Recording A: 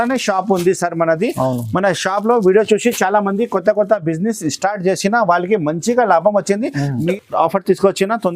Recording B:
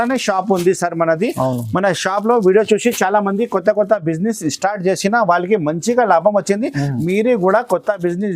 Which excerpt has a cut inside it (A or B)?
A